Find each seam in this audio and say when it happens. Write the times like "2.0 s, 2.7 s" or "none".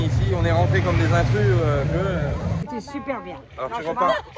2.7 s